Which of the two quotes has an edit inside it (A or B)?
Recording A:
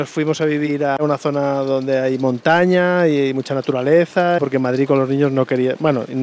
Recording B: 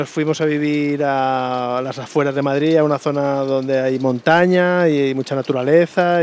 A